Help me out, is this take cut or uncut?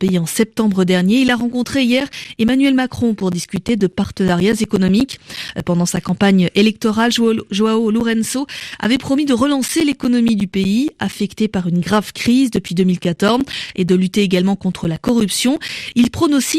uncut